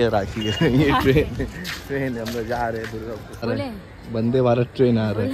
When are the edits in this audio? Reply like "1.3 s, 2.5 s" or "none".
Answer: 3.4 s